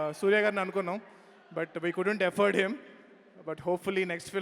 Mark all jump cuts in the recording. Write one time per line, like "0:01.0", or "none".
none